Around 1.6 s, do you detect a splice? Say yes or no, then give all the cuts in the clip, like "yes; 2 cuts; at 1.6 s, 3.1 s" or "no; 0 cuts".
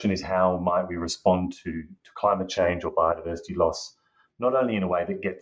no; 0 cuts